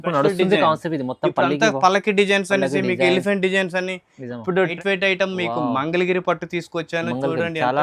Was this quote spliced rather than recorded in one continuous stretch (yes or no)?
yes